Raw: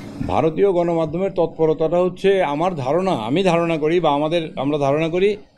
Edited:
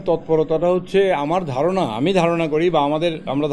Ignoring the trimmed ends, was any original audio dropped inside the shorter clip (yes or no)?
no